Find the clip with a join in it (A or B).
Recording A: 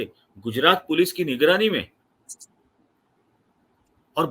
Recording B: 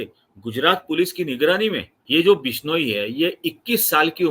B